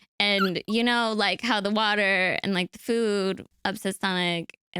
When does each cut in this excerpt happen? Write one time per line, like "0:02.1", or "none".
0:03.5